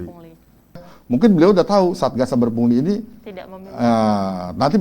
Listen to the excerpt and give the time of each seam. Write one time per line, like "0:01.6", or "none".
0:00.9